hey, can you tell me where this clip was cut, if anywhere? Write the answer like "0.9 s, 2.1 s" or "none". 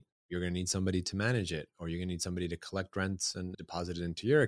3.5 s